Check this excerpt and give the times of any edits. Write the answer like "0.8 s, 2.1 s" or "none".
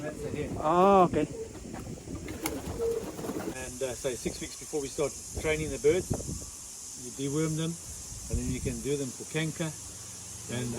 3.5 s